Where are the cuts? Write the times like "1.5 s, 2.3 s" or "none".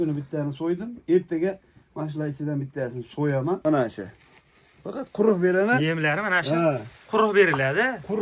3.6 s